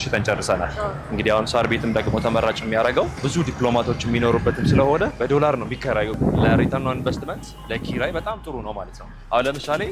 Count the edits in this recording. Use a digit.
3